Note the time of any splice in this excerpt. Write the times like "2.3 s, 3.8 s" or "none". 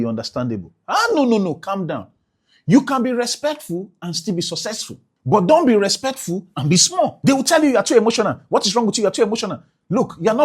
7.2 s